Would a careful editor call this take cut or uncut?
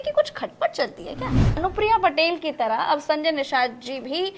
cut